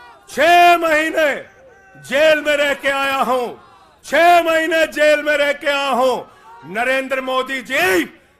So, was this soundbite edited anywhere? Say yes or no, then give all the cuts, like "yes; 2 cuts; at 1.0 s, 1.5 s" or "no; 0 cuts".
no; 0 cuts